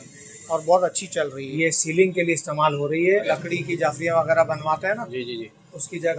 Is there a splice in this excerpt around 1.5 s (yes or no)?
yes